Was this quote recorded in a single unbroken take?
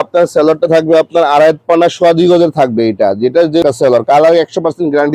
no; 1 cut; at 3.6 s

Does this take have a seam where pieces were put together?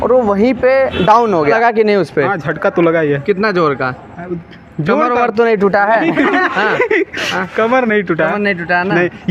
yes; 1 cut; at 1.5 s

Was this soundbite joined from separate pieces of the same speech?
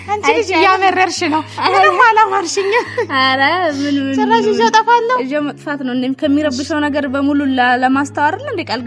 no; 0 cuts

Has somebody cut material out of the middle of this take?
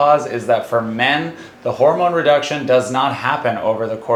no; 0 cuts

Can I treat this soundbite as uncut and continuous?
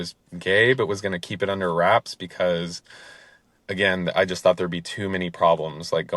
yes; 0 cuts

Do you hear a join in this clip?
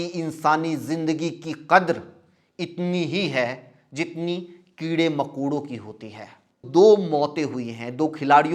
yes; 1 cut; at 6.6 s

